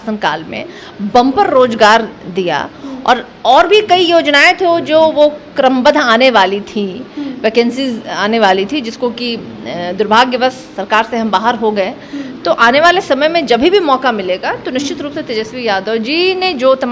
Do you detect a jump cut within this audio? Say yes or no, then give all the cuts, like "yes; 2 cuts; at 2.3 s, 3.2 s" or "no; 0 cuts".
no; 0 cuts